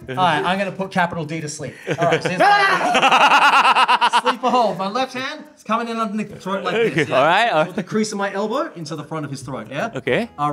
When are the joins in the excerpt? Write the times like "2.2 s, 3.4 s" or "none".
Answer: none